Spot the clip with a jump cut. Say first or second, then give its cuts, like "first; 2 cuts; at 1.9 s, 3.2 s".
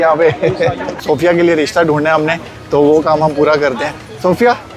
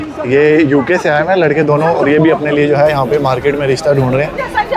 first; 1 cut; at 1.0 s